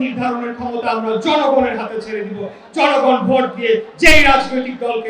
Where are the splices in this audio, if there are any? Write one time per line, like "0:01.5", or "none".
none